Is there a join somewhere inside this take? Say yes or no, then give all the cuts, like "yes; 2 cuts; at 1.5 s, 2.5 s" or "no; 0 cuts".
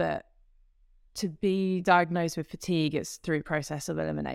no; 0 cuts